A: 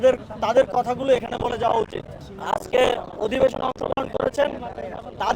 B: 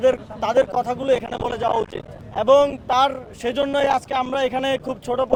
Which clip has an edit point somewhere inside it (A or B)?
A